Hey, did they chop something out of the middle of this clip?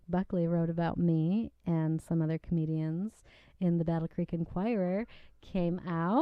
no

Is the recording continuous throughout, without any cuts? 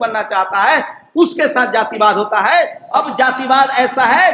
no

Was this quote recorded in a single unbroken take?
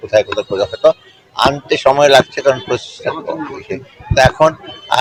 yes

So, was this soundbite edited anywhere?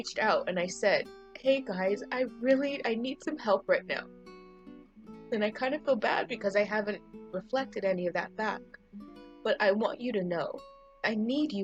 no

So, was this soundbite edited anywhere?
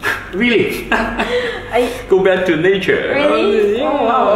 no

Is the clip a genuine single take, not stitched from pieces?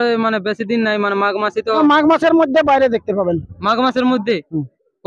yes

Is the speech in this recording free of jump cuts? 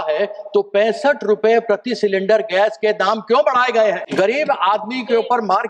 no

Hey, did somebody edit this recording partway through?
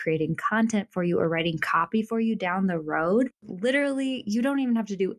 yes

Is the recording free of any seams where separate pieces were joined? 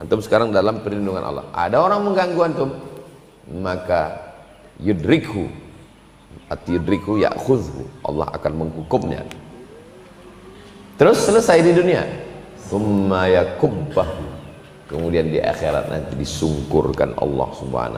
yes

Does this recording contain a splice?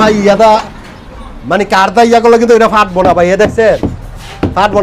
no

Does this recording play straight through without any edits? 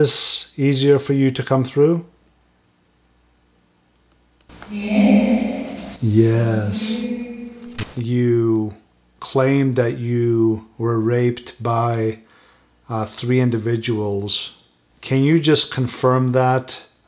no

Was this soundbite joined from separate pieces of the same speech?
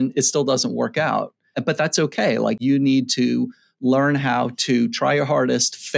yes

